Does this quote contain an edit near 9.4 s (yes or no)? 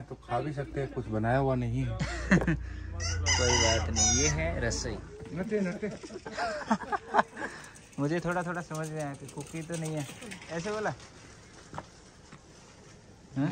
no